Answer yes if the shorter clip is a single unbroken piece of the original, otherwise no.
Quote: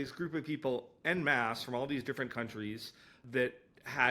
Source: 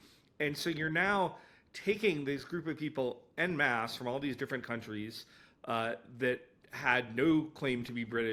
no